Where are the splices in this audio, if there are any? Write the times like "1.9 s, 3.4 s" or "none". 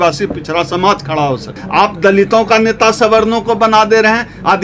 1.6 s